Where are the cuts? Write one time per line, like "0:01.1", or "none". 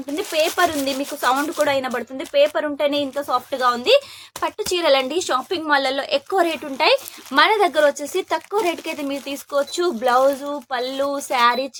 none